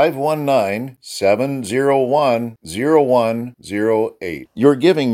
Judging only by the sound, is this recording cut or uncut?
uncut